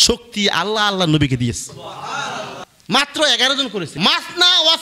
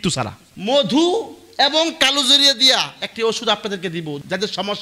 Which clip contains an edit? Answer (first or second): first